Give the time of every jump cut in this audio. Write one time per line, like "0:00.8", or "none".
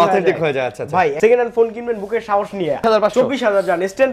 0:01.2
0:02.8